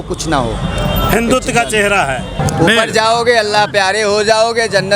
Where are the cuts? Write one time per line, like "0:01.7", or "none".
0:02.3